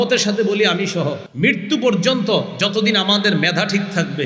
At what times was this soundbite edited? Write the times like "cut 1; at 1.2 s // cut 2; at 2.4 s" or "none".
cut 1; at 1.2 s